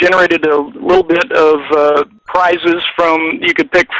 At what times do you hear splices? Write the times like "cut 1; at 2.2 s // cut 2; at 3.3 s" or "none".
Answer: cut 1; at 2.2 s